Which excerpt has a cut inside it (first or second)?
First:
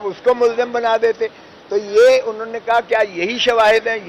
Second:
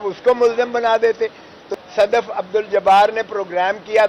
second